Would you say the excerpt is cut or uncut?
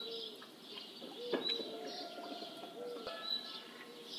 cut